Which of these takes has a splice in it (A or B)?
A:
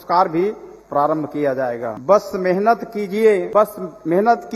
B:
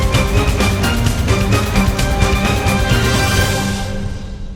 A